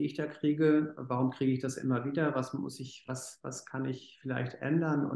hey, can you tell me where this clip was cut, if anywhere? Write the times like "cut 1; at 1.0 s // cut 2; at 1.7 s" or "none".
none